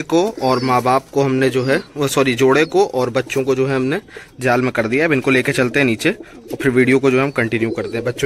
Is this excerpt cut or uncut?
uncut